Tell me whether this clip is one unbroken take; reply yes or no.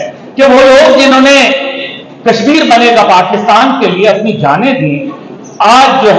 yes